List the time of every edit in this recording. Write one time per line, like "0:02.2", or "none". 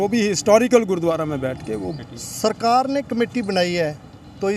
0:01.9